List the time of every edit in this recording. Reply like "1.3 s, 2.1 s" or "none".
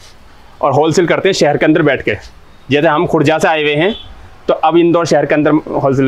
none